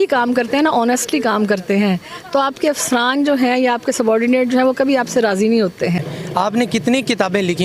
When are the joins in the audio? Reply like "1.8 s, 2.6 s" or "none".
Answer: 6.2 s